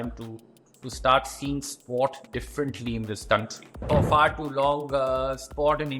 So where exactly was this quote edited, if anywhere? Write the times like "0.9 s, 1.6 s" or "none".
3.8 s

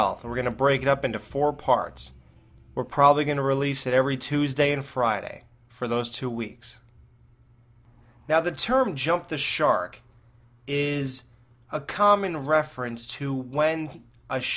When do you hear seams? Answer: 3.3 s

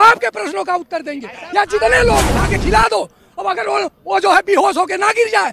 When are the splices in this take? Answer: 2.3 s

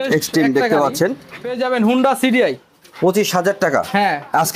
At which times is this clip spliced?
1.6 s

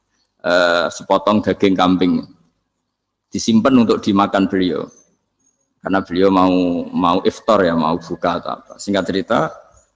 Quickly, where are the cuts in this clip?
none

